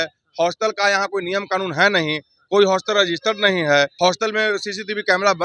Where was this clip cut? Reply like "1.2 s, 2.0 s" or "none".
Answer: 3.9 s